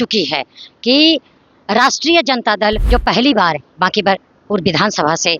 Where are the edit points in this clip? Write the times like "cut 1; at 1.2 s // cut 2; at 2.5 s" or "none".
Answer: cut 1; at 2.8 s

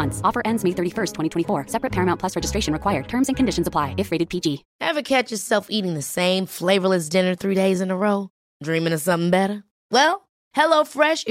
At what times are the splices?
cut 1; at 4.7 s

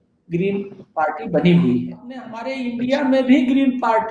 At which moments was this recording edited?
cut 1; at 2.6 s

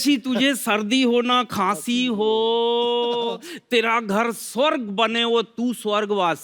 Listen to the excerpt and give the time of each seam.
none

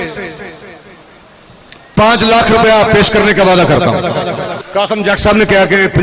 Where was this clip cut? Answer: cut 1; at 4.5 s

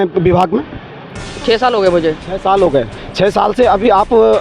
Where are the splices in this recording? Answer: none

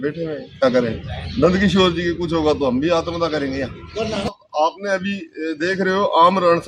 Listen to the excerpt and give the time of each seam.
cut 1; at 4.3 s

